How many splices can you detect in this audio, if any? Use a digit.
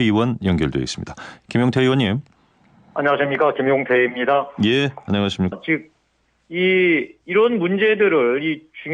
0